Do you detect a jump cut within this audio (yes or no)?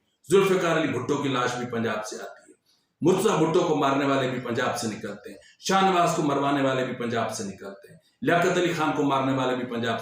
no